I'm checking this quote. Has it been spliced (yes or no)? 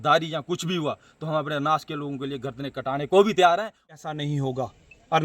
yes